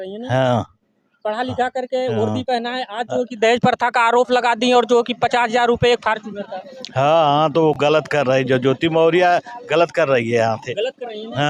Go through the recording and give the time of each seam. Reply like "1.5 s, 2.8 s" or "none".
none

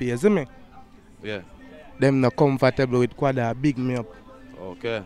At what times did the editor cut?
none

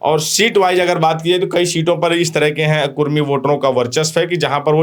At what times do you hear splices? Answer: none

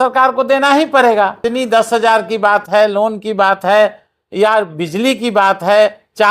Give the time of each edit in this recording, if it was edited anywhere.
1.4 s

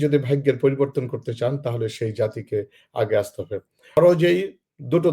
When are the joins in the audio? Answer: 4.0 s

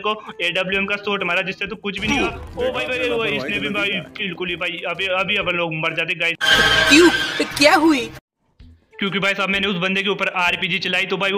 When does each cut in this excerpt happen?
none

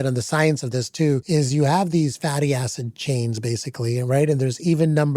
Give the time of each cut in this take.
1.2 s

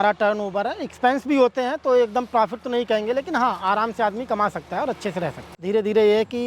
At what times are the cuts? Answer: 5.5 s

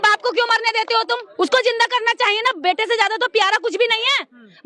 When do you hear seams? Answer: 1.3 s

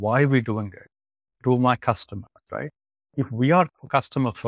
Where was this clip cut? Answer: none

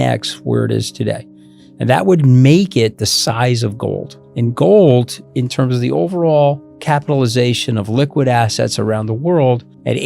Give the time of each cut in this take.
4.2 s, 5.2 s

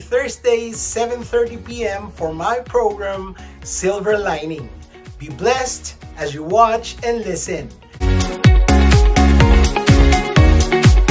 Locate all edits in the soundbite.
7.9 s

